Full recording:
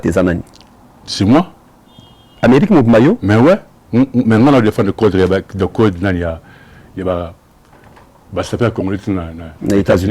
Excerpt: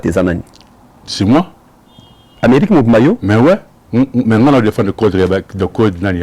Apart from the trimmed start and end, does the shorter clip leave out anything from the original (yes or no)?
no